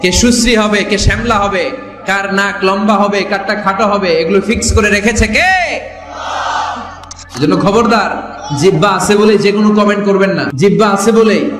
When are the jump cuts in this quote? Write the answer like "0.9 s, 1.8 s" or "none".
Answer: 7.2 s, 10.5 s